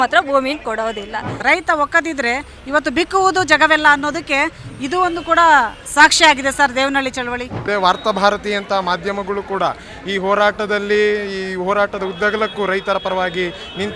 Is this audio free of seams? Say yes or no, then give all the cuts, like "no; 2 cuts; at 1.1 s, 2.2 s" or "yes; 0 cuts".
no; 2 cuts; at 1.3 s, 7.6 s